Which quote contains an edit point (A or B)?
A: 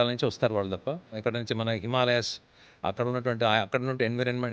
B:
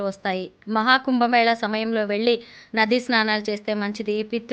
A